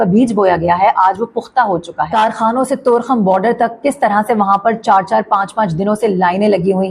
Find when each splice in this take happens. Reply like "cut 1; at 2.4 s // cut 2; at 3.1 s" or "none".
cut 1; at 2.1 s